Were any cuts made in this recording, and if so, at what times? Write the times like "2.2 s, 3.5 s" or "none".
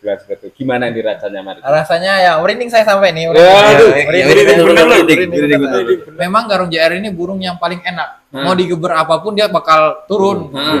6.1 s